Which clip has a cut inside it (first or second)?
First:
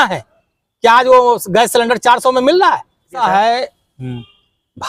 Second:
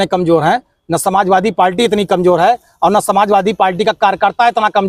first